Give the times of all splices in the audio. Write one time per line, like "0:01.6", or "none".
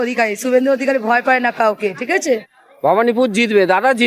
0:02.2